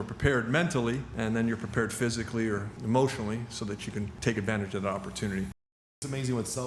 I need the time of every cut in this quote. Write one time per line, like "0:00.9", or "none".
0:01.1
0:02.7
0:04.1
0:05.8